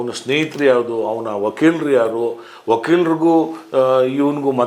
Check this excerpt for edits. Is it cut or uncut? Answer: uncut